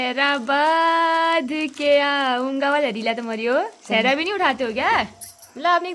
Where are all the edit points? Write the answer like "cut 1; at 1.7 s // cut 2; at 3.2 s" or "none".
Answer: none